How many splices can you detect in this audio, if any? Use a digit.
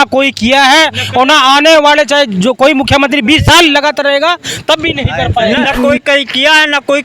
1